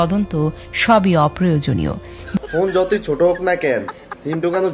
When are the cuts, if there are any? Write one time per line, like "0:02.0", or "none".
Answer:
0:02.2

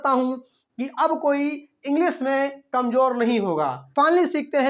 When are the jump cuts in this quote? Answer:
0:03.8

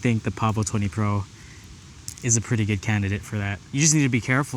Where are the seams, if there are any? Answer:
0:03.6

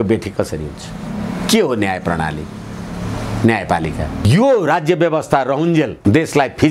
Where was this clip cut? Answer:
0:04.2

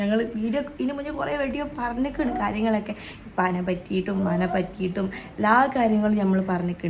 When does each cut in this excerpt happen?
none

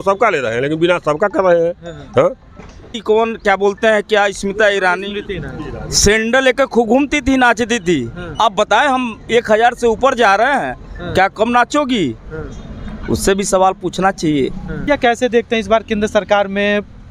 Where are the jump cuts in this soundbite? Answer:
0:02.9
0:14.8

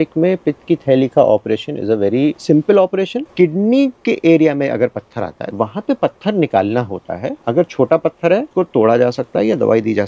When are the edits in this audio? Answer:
0:02.4
0:03.3
0:05.4
0:07.4
0:08.5

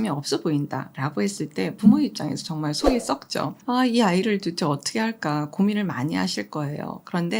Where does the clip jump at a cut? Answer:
0:00.9
0:03.6

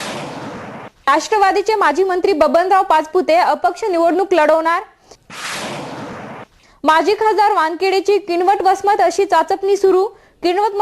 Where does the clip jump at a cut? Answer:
0:00.9

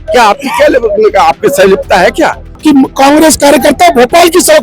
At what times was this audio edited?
0:02.5

